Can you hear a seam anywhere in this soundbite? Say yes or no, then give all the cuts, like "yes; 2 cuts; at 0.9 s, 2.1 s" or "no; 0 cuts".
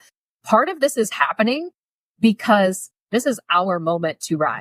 yes; 1 cut; at 3.0 s